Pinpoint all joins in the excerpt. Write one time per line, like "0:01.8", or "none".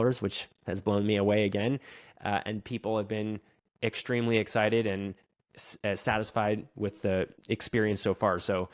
0:07.4